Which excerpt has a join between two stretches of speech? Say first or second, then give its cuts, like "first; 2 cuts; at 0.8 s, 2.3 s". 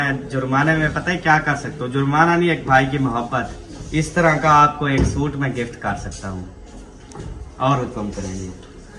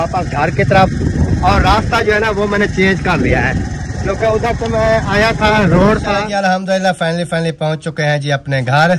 second; 1 cut; at 6.1 s